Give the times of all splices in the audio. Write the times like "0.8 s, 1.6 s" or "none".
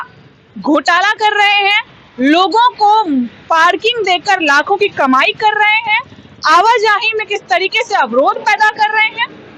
none

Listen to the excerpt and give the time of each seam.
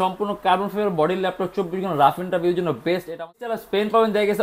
3.4 s

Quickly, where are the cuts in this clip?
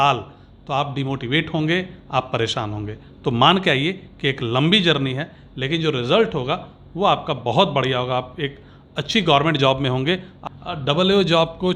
10.3 s

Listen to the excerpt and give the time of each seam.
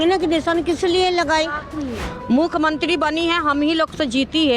2.0 s

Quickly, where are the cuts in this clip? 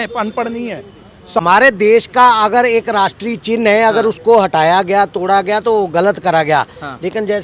1.4 s

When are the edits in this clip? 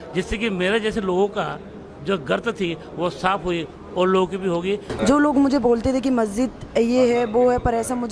4.9 s

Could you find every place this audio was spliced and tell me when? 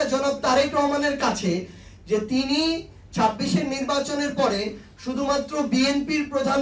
none

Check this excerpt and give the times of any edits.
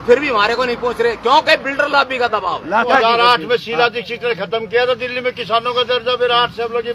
2.9 s

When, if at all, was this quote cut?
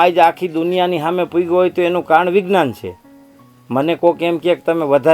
none

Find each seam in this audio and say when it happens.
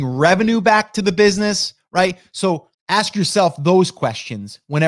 2.7 s

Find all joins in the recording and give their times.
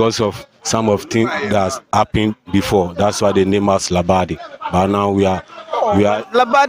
none

